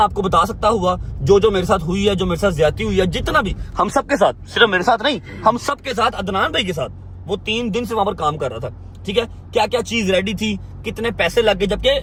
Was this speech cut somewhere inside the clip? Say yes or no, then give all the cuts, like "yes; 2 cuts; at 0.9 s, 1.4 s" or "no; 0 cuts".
no; 0 cuts